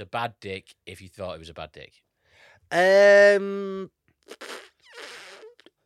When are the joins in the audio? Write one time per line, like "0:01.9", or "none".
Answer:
none